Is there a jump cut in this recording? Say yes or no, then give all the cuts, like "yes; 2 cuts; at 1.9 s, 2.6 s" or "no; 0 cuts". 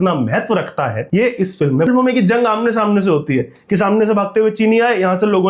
yes; 2 cuts; at 1.0 s, 1.9 s